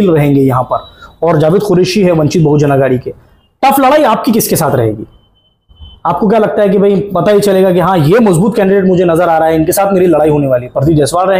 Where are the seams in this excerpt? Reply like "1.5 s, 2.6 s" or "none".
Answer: none